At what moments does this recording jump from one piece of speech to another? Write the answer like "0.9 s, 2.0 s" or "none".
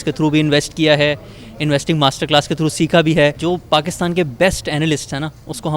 3.4 s